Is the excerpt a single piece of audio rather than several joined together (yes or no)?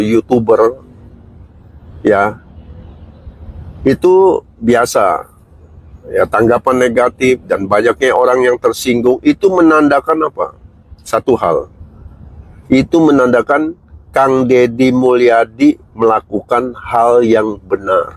yes